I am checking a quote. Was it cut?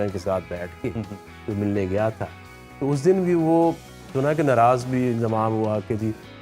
no; 0 cuts

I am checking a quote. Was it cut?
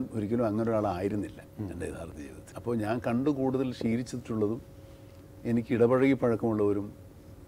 no; 0 cuts

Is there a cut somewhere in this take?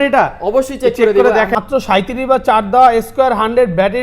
yes; 1 cut; at 1.5 s

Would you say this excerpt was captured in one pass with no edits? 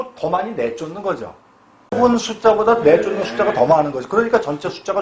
no; 1 cut; at 2.0 s

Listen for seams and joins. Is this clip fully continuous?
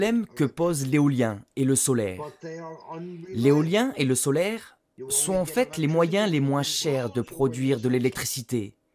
yes; 0 cuts

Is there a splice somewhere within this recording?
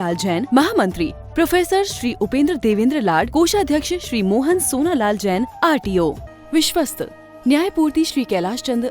yes; 1 cut; at 6.3 s

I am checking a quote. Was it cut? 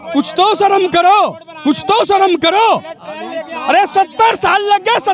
no; 0 cuts

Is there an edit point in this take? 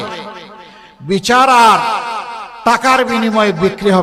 no; 0 cuts

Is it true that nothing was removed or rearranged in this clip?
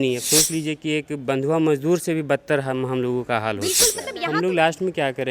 no; 1 cut; at 4.1 s

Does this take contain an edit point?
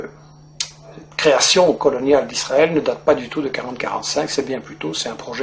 no; 0 cuts

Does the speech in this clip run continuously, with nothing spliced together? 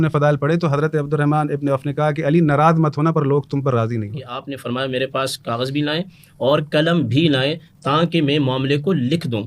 no; 1 cut; at 4.5 s

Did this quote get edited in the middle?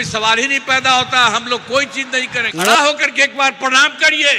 yes; 1 cut; at 2.5 s

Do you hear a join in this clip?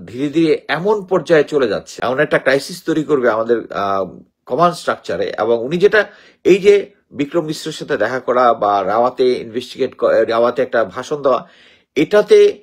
yes; 1 cut; at 1.9 s

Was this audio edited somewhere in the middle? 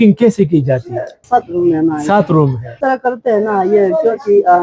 no; 0 cuts

